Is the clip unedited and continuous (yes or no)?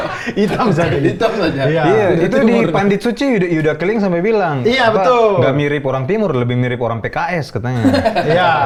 yes